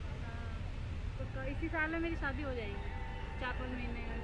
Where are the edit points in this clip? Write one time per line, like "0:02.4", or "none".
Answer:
0:01.2